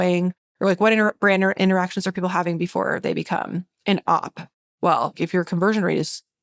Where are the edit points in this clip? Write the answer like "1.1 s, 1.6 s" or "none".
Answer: 3.7 s, 5.2 s